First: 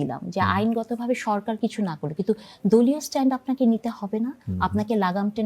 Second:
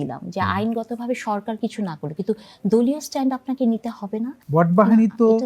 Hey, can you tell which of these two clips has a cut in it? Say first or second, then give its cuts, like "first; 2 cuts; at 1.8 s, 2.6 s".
second; 1 cut; at 4.4 s